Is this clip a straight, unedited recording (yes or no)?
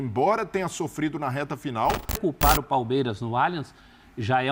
no